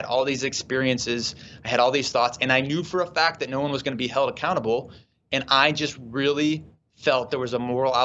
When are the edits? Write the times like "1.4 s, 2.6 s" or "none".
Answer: none